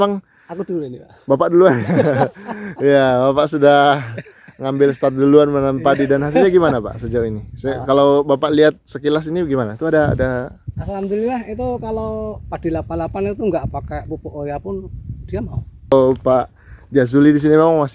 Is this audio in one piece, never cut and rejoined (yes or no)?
no